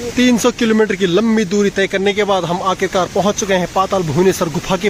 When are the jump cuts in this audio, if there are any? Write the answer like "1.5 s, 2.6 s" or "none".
none

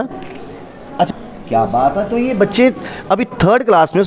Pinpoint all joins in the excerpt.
1.1 s

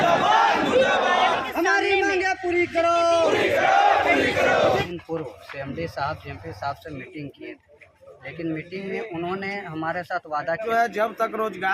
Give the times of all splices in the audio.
4.9 s, 10.6 s

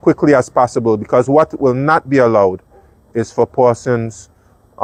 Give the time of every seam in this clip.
none

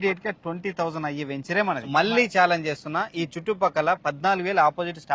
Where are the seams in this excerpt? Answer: 1.7 s

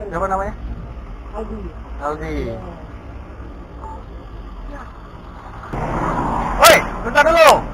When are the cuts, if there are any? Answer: 5.7 s

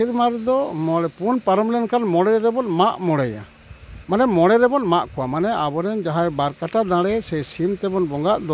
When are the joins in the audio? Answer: none

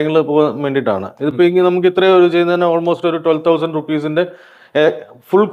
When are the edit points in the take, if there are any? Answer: none

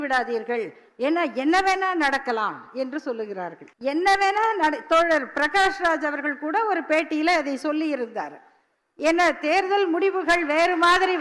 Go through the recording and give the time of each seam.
3.6 s

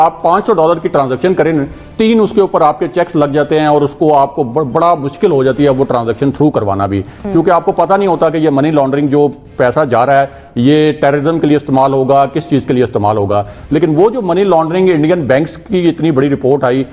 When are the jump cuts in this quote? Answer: none

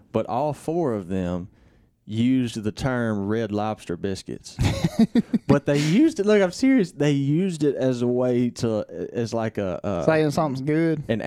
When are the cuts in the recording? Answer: none

